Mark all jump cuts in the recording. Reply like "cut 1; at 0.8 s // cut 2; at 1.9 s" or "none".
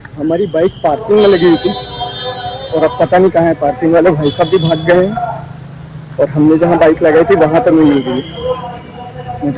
none